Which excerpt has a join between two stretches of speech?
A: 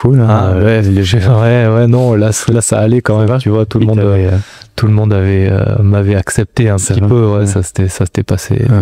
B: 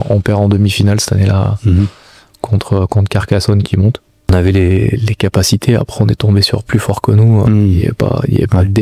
B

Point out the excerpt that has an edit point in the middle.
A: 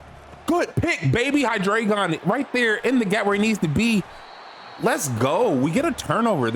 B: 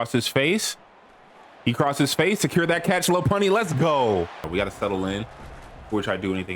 B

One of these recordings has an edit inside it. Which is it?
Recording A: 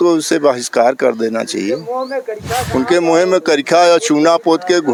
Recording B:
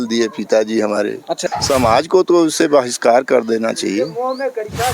B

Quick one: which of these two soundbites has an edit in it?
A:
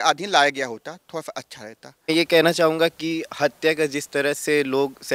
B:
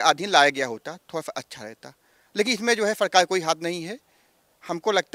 A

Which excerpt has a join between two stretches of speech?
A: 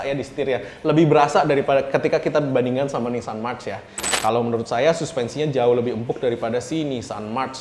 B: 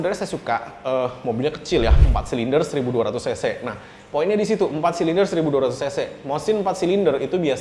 A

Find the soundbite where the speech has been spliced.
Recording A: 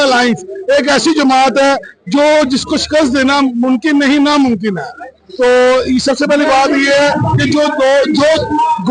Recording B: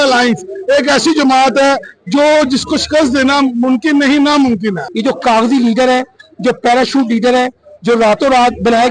B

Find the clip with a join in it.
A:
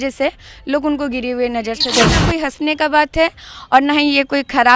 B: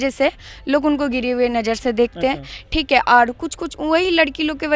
A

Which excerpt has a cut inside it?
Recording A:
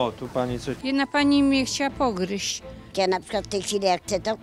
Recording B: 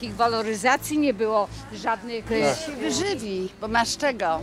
A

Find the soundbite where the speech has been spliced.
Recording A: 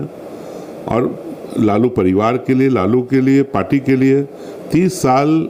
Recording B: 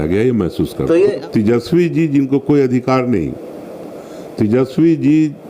B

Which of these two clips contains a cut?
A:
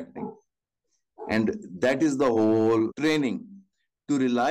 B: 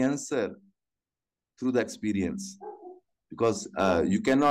A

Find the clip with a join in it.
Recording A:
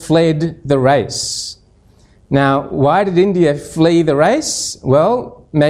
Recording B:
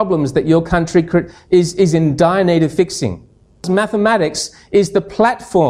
B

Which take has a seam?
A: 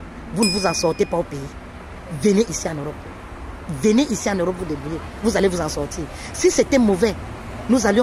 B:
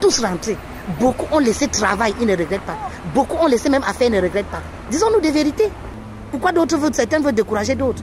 B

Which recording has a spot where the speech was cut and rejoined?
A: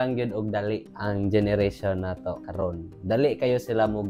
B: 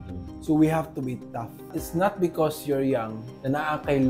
B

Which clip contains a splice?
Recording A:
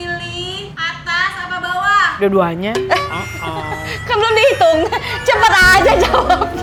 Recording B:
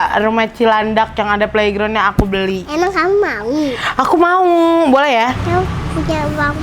B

